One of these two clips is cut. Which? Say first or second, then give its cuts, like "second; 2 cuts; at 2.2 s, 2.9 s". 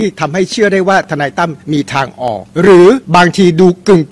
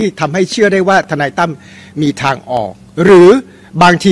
first; 3 cuts; at 1.6 s, 2.5 s, 3.0 s